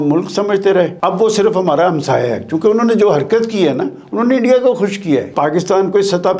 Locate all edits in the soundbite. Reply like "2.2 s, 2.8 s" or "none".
0.9 s, 5.3 s